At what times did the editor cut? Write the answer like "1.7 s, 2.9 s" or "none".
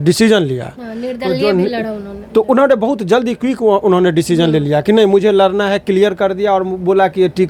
none